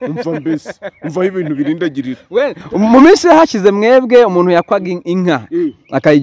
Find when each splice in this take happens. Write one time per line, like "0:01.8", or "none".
none